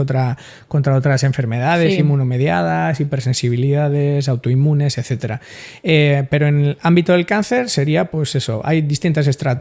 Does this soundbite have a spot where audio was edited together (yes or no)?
no